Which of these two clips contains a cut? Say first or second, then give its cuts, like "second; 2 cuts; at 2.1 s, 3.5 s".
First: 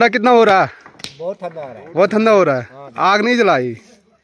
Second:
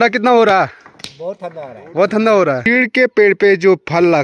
second; 1 cut; at 2.6 s